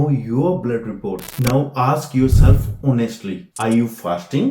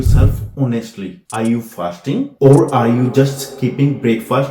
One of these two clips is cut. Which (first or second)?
first